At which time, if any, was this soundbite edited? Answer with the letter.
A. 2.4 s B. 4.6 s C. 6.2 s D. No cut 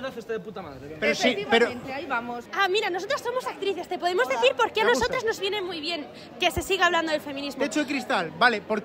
A